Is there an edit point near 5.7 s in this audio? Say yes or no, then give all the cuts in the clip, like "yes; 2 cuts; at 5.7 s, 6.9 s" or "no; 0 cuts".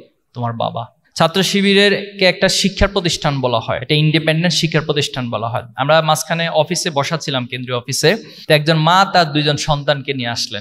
no; 3 cuts; at 1.0 s, 3.8 s, 8.3 s